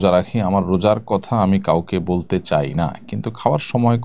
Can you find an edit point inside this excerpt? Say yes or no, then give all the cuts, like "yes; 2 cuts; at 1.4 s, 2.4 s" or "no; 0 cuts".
no; 0 cuts